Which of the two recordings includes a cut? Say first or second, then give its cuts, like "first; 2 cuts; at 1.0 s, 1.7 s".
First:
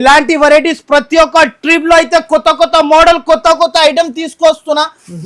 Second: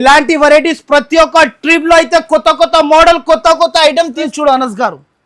second; 1 cut; at 4.3 s